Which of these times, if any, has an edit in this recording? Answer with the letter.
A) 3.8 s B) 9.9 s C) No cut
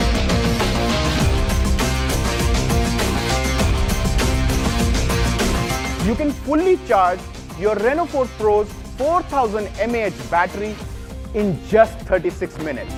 C